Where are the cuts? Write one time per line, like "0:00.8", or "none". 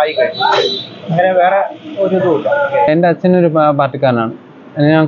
0:02.9